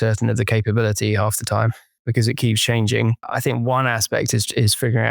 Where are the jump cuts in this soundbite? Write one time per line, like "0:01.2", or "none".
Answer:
0:02.0
0:03.3